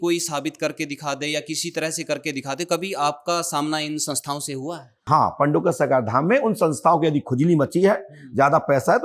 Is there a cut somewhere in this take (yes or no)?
yes